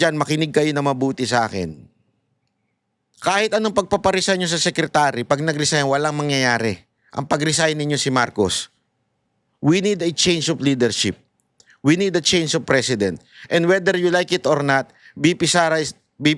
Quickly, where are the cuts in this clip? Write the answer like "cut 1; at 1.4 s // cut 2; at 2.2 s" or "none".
none